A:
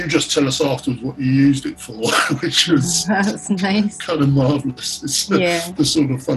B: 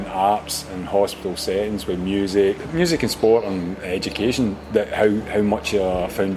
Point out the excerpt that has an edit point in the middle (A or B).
B